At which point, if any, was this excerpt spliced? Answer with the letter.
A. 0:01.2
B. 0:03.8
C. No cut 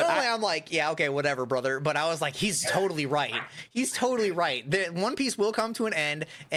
C